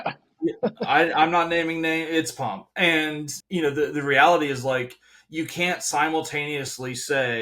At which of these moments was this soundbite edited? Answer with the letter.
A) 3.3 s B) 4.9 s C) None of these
A